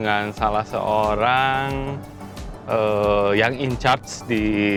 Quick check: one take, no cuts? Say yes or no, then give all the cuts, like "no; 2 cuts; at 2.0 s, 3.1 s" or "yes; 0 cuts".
yes; 0 cuts